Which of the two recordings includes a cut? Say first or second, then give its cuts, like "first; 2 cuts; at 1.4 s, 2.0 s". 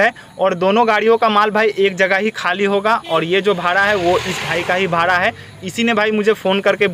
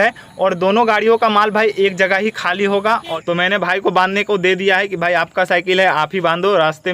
second; 1 cut; at 3.1 s